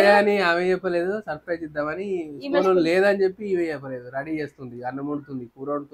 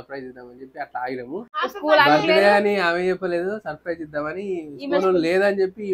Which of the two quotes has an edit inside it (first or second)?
second